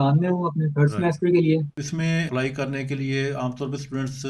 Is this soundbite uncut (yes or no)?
no